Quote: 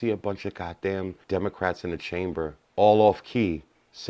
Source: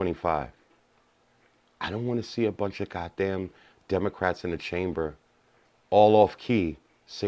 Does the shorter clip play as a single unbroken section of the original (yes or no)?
no